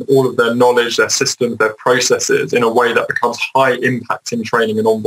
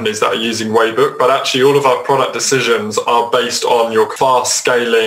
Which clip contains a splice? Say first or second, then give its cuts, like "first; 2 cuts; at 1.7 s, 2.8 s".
second; 1 cut; at 4.1 s